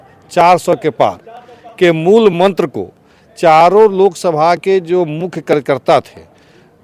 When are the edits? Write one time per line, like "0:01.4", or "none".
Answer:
none

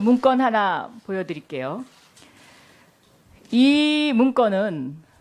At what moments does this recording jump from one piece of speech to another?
0:01.3

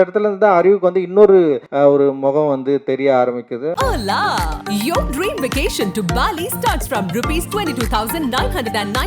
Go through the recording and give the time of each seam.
0:01.6
0:03.7

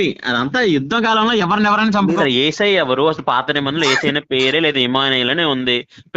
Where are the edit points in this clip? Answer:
0:02.2

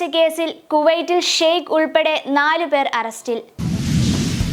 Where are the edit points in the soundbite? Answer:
0:03.5

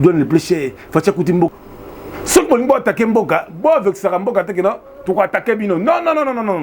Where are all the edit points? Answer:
0:01.5

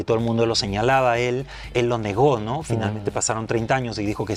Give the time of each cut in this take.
none

